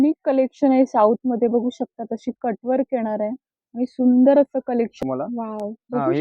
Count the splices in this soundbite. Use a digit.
1